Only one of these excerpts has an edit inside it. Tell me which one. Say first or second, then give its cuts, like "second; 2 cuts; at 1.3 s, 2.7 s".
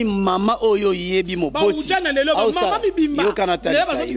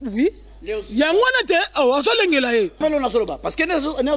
second; 1 cut; at 2.8 s